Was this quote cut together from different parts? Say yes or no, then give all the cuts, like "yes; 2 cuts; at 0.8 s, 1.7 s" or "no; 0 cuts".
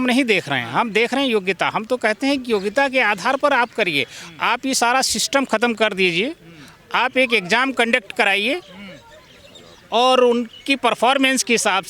no; 0 cuts